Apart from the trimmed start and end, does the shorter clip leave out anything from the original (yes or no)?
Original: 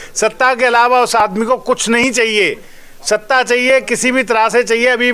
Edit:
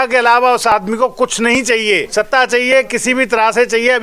yes